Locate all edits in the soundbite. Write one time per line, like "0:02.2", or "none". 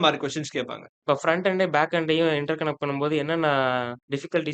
0:01.0